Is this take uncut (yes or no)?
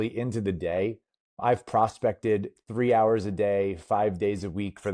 no